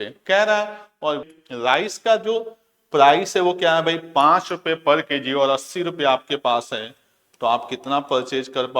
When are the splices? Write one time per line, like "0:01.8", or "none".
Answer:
0:01.2